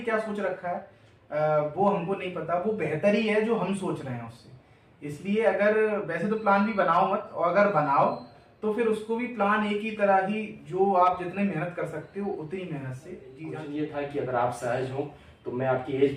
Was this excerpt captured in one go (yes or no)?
yes